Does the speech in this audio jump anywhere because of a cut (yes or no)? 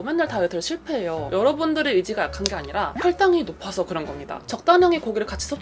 yes